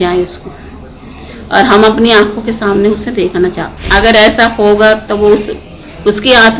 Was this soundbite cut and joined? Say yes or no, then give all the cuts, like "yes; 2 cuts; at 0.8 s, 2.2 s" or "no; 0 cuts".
yes; 1 cut; at 3.8 s